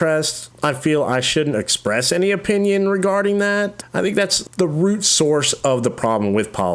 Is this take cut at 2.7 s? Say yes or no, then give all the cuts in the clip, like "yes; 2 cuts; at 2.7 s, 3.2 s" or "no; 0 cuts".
no; 1 cut; at 4.0 s